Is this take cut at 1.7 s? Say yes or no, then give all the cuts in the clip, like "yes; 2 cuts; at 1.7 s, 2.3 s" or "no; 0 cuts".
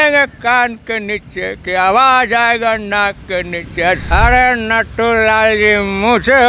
no; 1 cut; at 4.1 s